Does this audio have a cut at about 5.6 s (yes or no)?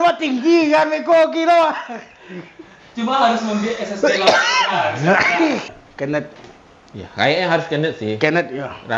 yes